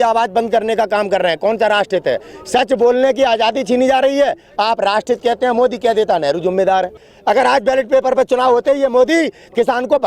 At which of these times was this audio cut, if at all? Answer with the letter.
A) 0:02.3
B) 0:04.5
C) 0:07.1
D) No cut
C